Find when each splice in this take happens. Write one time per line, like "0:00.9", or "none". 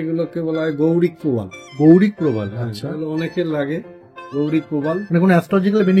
none